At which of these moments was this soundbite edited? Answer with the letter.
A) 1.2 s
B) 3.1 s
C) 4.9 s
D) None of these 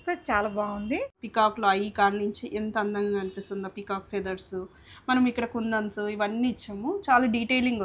A